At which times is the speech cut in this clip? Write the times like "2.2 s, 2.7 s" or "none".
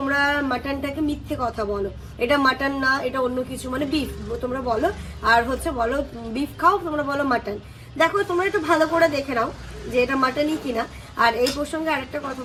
none